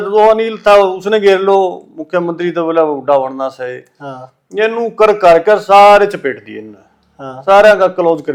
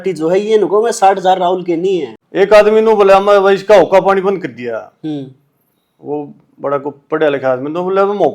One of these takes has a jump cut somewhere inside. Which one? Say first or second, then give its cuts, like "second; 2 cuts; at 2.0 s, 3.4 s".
second; 1 cut; at 2.2 s